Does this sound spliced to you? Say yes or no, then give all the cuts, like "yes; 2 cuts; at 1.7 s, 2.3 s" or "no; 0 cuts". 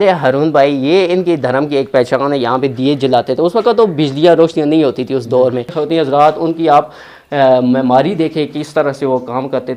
yes; 1 cut; at 5.8 s